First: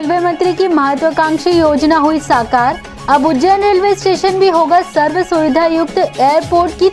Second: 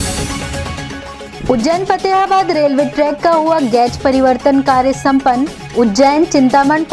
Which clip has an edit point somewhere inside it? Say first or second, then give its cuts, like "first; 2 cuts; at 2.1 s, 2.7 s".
second; 1 cut; at 1.3 s